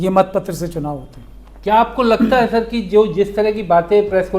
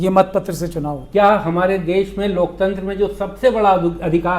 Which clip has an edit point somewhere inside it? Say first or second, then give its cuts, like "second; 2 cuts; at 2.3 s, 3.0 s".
second; 1 cut; at 0.9 s